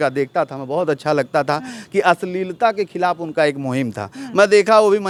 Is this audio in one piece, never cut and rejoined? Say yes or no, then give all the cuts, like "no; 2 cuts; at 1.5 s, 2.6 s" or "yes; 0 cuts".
yes; 0 cuts